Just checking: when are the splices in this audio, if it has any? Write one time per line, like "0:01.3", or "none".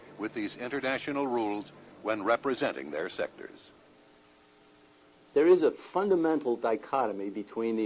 0:02.5